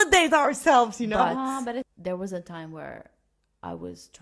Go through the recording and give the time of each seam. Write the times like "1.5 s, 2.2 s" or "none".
1.9 s